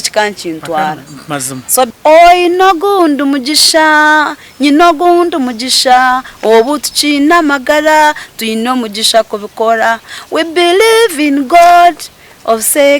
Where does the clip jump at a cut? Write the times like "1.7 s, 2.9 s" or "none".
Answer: 1.9 s